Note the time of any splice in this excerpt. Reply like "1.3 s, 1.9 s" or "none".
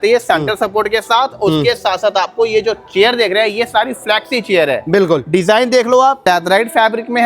6.2 s